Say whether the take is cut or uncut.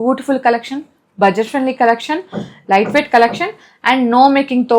uncut